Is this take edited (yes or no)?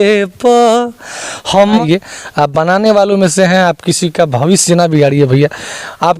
yes